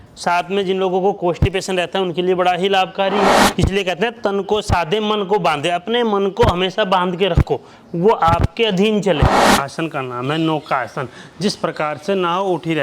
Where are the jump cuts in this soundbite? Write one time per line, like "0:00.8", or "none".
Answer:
0:03.4
0:09.5